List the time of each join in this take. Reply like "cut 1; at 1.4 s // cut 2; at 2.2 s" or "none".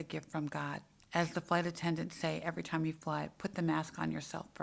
cut 1; at 0.9 s